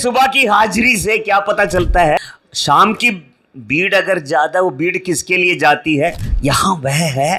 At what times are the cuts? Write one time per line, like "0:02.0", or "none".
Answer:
0:02.2
0:06.3